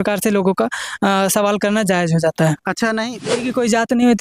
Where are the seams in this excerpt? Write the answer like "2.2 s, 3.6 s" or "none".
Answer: 3.3 s